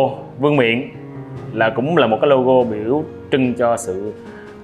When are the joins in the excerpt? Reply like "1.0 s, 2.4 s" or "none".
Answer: none